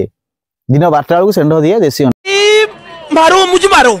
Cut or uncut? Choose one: uncut